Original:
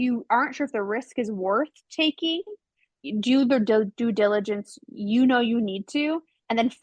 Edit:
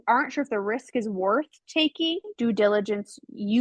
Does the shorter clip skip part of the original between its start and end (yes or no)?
yes